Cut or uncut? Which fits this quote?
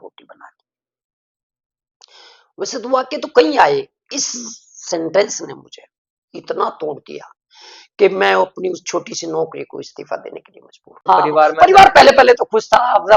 cut